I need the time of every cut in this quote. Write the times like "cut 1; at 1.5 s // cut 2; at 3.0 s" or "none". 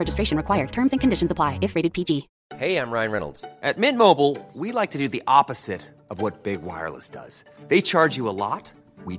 cut 1; at 2.4 s